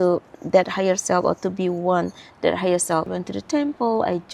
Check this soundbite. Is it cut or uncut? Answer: cut